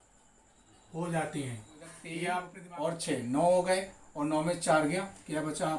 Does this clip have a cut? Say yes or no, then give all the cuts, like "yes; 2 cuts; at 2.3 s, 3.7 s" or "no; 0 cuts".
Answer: yes; 1 cut; at 2.6 s